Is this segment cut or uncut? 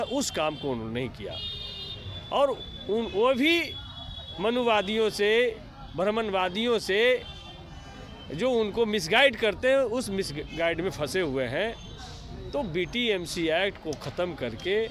uncut